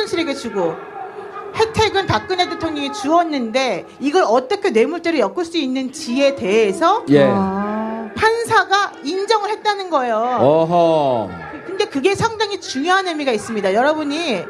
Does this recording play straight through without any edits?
no; 1 cut; at 9.8 s

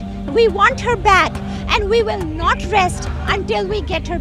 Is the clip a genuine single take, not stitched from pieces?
yes; 0 cuts

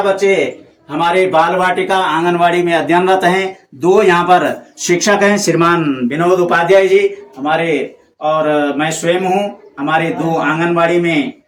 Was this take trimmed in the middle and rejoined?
no; 0 cuts

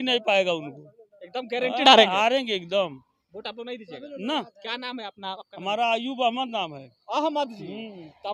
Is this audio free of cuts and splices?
yes; 0 cuts

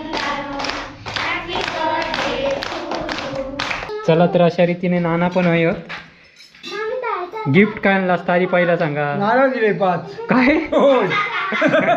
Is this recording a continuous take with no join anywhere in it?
no; 1 cut; at 3.9 s

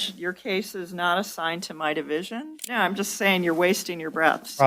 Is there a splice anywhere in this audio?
yes; 1 cut; at 2.6 s

